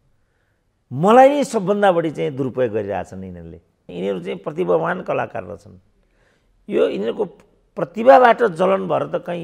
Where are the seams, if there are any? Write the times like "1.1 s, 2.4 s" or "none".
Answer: 3.9 s